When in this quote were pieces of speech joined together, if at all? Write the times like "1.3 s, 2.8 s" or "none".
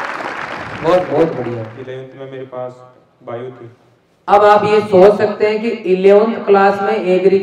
1.1 s